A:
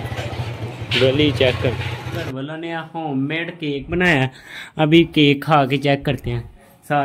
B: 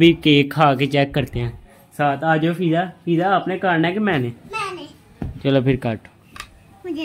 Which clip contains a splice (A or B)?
A